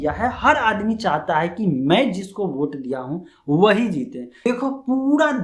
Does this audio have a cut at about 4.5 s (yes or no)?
yes